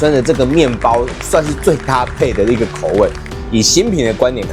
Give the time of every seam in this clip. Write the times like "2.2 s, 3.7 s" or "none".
3.2 s